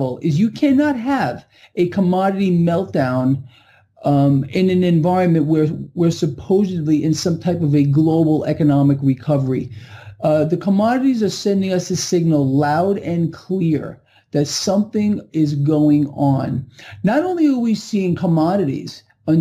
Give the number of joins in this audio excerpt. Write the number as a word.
one